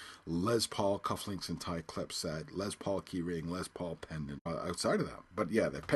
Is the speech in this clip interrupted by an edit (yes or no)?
no